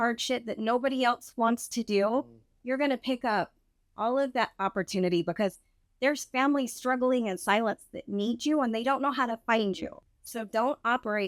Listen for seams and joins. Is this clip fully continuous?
no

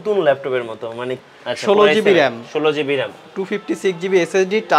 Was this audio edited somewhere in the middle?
yes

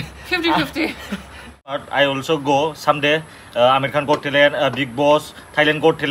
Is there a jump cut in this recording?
yes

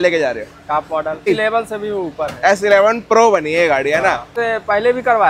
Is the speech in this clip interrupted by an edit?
yes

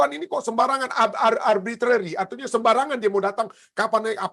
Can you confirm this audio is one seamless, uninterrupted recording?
yes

